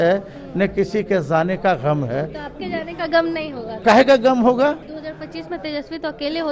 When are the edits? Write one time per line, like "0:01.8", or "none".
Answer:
0:03.7
0:04.9